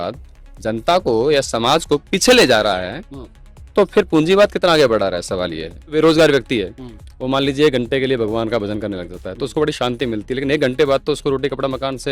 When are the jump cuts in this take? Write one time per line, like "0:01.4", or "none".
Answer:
0:05.9